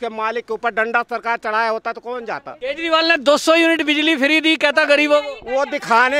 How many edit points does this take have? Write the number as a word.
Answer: one